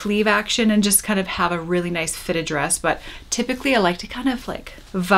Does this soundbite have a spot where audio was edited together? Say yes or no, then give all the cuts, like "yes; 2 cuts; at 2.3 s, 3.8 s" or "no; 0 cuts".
no; 0 cuts